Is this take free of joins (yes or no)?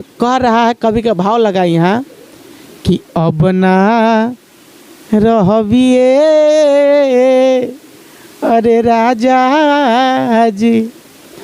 yes